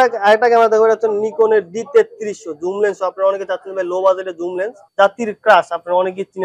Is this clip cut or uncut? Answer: cut